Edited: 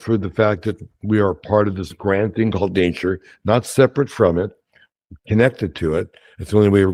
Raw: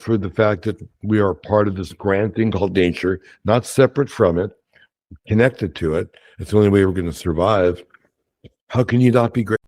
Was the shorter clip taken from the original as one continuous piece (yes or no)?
yes